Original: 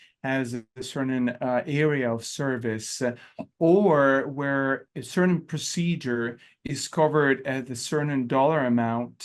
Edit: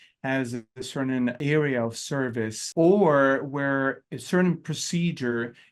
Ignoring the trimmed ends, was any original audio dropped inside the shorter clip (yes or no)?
yes